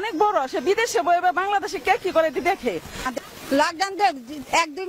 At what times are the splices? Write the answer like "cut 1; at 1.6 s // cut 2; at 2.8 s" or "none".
cut 1; at 3.1 s